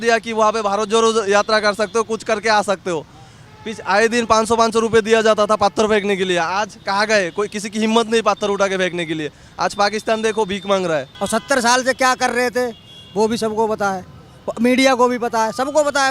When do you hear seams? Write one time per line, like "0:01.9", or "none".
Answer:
0:11.1

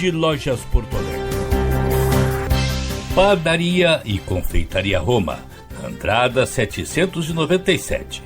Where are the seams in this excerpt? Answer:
0:01.1
0:03.0

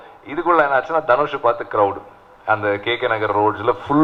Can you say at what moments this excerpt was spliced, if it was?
none

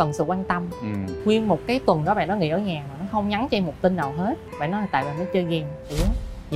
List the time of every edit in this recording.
0:01.1
0:04.4

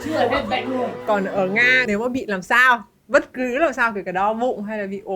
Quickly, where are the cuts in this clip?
0:01.0
0:01.8

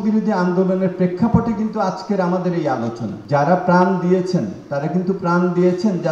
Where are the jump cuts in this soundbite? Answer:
0:03.1

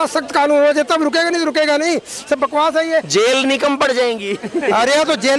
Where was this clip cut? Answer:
none

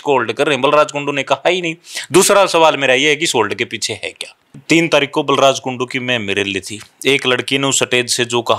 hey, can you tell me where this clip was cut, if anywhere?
0:04.6

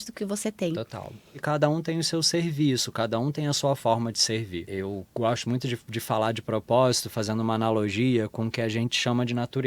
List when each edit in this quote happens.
0:01.3
0:04.7

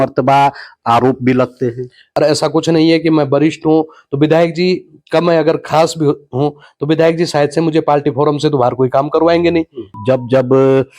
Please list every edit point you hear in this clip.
0:02.0
0:10.0

